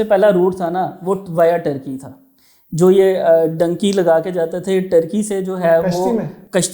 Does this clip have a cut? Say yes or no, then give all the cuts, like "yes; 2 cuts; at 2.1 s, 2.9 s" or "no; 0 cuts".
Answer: no; 0 cuts